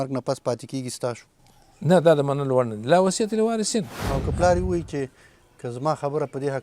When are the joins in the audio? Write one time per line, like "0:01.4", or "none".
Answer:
0:01.4
0:04.0